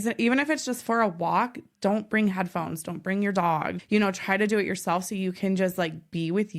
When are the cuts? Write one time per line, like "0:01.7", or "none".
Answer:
0:03.7